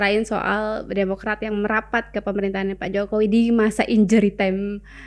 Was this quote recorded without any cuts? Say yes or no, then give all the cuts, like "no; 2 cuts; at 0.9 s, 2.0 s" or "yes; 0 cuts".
yes; 0 cuts